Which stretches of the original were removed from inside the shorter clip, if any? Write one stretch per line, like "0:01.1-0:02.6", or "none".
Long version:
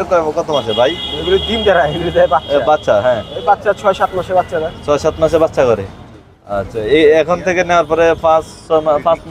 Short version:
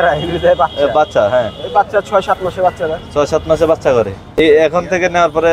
0:06.1-0:06.9